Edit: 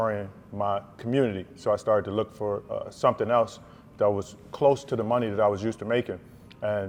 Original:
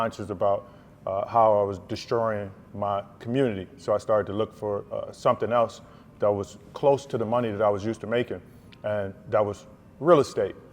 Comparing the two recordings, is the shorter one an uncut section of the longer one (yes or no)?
yes